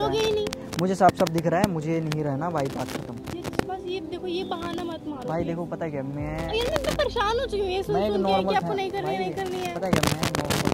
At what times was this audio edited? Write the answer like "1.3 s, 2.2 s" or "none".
none